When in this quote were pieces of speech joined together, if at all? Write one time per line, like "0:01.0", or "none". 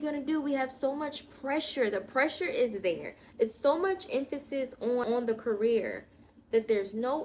0:05.0

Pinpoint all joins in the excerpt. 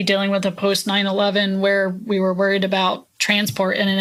none

